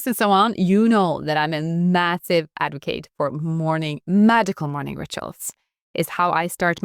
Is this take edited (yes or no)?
no